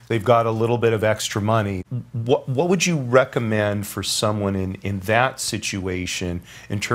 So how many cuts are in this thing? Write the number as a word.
one